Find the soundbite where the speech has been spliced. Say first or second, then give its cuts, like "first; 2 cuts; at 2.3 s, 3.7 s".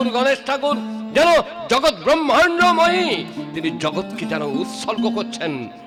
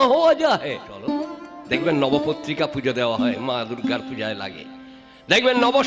second; 1 cut; at 1.1 s